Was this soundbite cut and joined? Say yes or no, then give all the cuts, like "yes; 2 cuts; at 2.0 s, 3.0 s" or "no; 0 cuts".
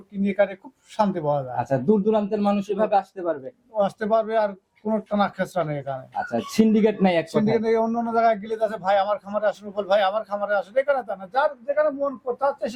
no; 0 cuts